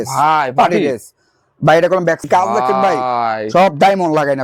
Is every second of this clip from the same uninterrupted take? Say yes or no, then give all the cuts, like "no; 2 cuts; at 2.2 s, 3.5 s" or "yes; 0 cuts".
no; 1 cut; at 2.2 s